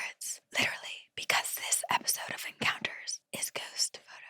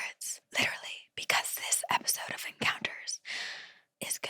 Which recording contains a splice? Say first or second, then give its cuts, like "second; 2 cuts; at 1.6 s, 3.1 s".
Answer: first; 1 cut; at 3.1 s